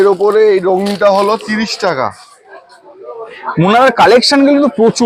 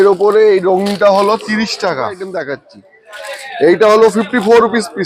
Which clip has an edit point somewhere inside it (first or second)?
second